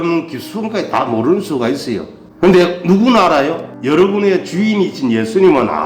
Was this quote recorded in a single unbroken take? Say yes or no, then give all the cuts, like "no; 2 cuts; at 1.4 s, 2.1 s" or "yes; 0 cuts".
yes; 0 cuts